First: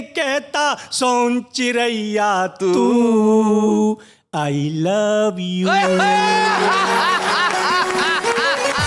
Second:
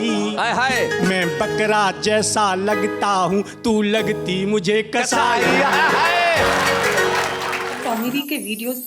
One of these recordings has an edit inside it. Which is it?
second; 1 cut; at 7.7 s

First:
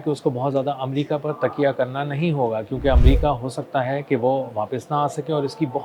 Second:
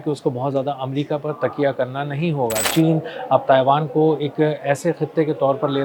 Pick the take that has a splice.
second; 1 cut; at 2.7 s

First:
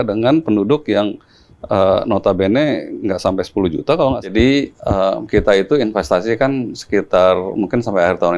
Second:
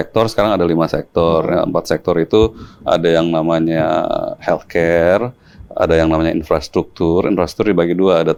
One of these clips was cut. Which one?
first; 1 cut; at 4.3 s

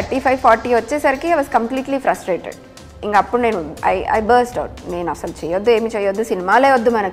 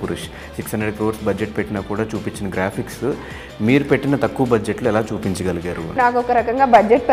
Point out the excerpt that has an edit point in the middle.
second; 1 cut; at 5.9 s

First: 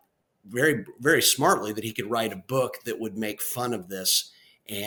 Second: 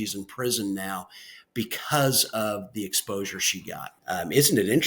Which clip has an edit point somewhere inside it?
second; 1 cut; at 3.9 s

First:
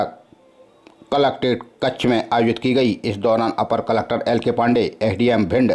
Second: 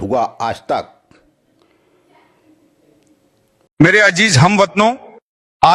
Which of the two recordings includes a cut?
second; 1 cut; at 3.7 s

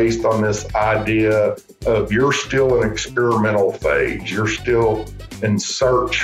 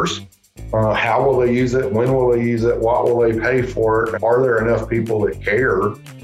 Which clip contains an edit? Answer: second; 1 cut; at 4.2 s

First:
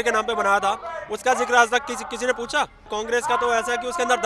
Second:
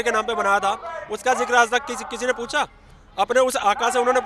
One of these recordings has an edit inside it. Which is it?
first; 1 cut; at 2.9 s

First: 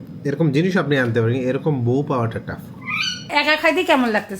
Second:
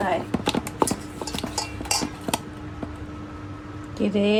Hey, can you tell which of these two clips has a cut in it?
first; 1 cut; at 3.3 s

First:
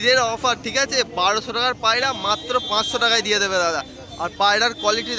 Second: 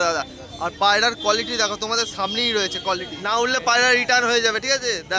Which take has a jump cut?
second; 1 cut; at 3.1 s

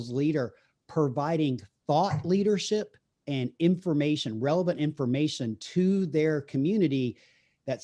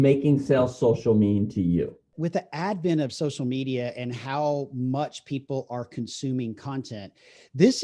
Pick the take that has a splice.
second; 1 cut; at 2.0 s

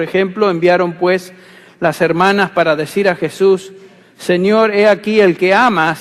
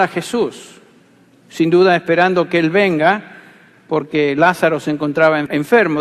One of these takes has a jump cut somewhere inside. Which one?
second; 1 cut; at 1.6 s

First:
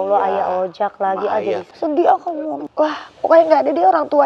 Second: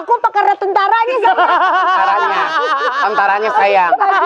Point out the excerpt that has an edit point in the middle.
first; 2 cuts; at 1.6 s, 2.6 s

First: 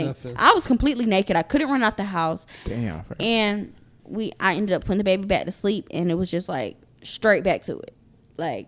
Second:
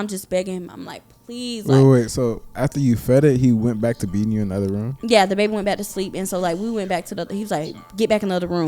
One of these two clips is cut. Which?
first; 1 cut; at 4.0 s

